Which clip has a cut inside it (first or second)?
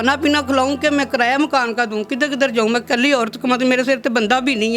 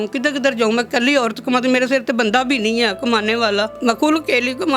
second